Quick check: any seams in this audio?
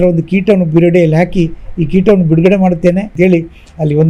yes; 1 cut; at 3.1 s

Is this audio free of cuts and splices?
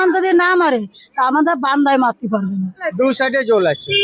no; 1 cut; at 2.9 s

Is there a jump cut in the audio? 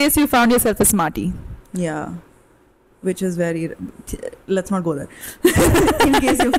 no; 0 cuts

